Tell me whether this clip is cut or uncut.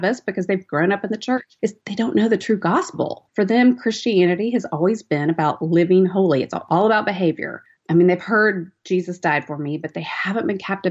cut